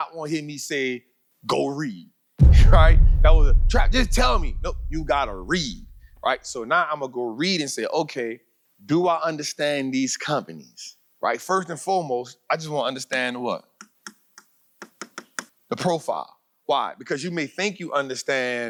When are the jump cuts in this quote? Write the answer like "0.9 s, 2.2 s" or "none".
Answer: none